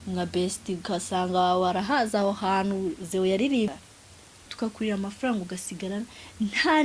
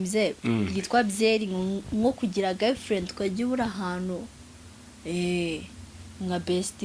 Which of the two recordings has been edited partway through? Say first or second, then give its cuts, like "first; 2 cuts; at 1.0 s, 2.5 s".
first; 1 cut; at 3.7 s